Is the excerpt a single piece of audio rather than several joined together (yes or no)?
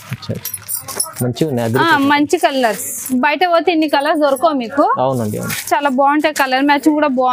yes